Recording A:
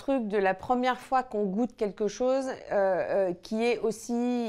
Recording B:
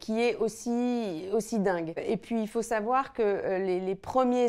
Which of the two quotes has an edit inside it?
B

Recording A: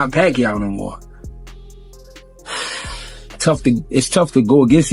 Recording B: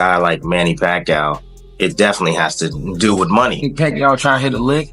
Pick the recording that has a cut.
B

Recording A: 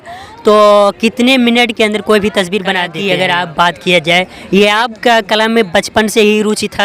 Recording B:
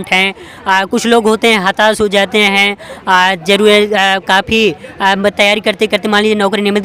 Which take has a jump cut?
A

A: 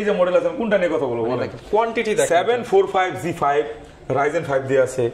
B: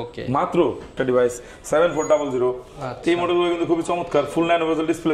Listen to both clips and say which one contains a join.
B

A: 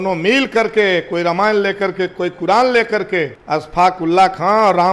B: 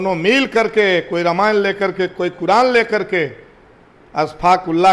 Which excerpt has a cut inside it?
A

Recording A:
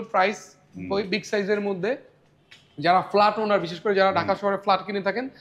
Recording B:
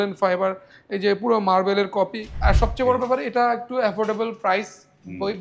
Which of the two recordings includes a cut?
B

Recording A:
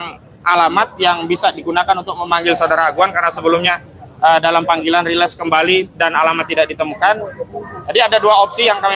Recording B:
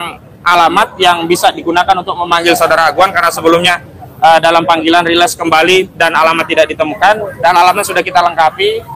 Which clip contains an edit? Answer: B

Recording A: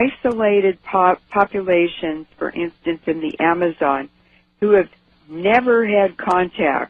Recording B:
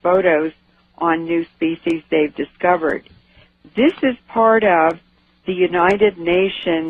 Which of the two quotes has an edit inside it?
A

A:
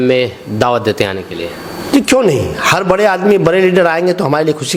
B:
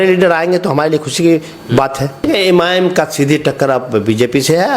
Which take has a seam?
B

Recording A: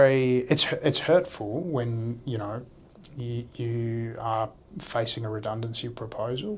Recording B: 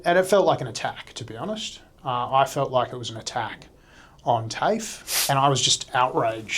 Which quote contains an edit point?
B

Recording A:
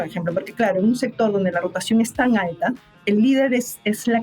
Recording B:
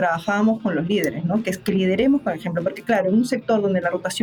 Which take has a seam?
A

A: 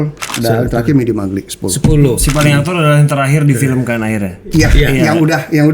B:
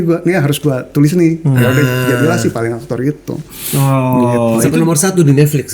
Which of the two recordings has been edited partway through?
A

